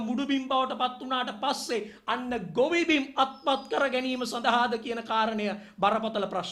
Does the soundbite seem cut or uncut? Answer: uncut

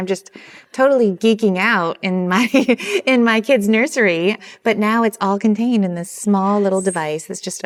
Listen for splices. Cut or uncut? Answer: uncut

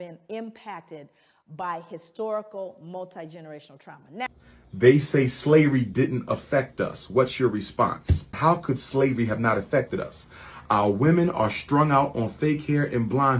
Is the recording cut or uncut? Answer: cut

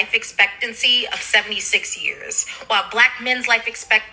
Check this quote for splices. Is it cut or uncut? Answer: uncut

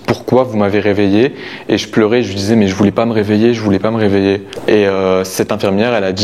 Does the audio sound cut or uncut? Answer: uncut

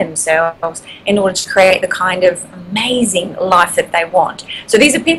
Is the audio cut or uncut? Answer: uncut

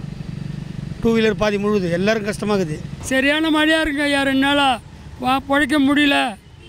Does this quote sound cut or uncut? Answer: cut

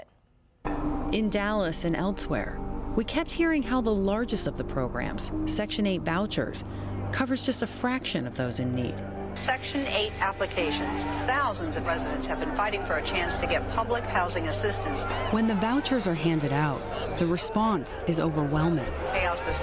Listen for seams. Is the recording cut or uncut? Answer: cut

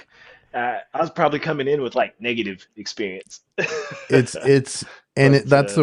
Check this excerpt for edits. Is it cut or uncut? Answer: uncut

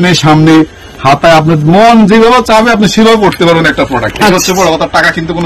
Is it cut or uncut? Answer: uncut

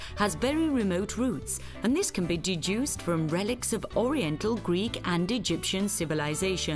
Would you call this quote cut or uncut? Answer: uncut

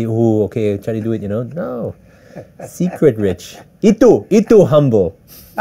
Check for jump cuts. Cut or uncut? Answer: uncut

